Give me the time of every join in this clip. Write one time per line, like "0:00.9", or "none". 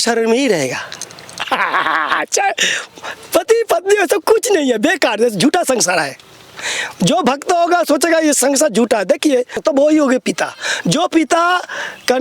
0:09.6